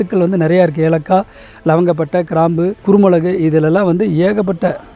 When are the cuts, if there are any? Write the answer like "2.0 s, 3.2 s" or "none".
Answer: 2.8 s